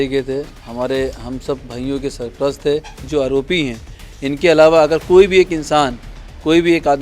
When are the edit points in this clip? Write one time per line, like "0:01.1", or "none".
0:03.0